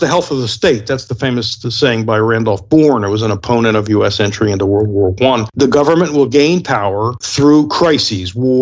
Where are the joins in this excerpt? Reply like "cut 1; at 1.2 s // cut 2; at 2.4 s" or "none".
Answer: cut 1; at 5.5 s // cut 2; at 7.2 s